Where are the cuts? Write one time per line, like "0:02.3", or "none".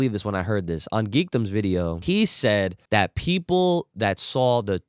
0:02.0
0:02.8